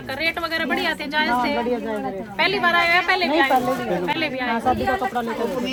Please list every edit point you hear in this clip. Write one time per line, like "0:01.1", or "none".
none